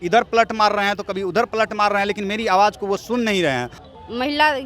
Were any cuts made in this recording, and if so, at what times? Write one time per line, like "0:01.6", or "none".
0:03.8